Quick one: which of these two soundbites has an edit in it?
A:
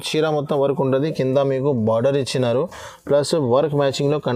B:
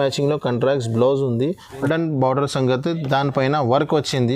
B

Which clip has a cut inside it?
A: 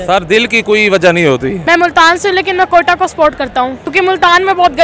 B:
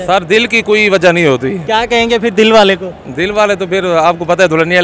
A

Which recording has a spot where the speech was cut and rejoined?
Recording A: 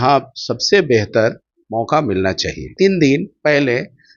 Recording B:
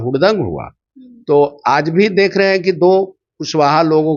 A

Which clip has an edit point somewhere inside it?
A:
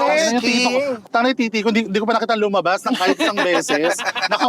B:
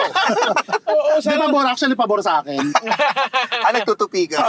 A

